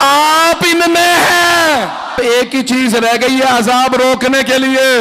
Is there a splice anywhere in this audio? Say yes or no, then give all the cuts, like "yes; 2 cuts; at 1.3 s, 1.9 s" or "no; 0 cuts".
yes; 1 cut; at 2.2 s